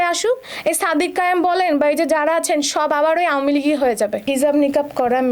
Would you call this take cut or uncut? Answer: cut